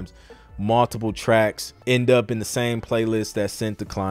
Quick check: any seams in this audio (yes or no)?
yes